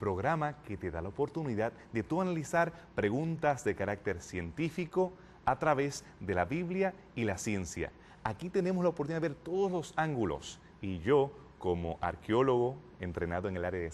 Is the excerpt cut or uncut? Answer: cut